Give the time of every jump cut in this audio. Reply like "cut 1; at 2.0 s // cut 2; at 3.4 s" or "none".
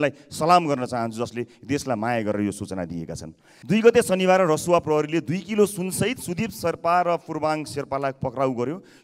cut 1; at 3.6 s